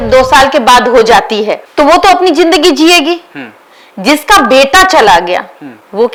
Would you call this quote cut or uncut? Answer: uncut